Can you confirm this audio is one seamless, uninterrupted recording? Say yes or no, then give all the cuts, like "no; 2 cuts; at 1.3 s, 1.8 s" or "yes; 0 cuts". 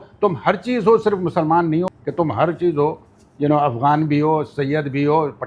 no; 1 cut; at 1.9 s